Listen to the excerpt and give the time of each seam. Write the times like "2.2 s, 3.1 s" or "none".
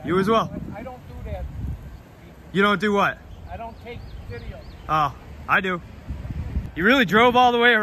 6.7 s